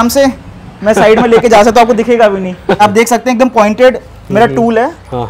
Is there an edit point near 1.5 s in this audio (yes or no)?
no